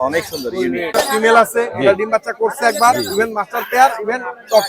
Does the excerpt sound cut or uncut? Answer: cut